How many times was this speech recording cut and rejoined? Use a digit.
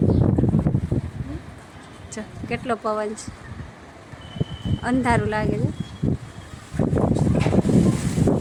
0